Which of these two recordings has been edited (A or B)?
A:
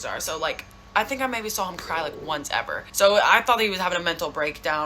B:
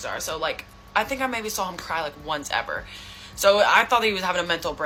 A